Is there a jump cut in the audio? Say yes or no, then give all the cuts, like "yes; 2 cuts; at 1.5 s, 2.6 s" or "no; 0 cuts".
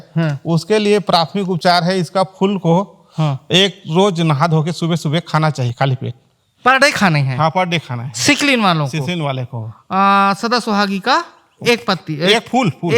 no; 0 cuts